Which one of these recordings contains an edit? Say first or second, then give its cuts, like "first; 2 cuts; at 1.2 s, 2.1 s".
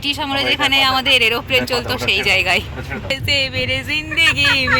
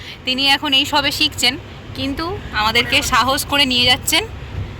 first; 1 cut; at 3.1 s